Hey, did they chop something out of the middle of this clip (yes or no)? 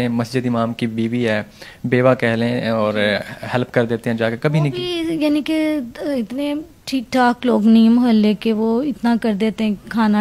no